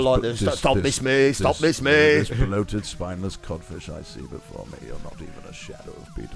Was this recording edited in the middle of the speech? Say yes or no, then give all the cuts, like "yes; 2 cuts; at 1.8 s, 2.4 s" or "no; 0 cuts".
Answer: no; 0 cuts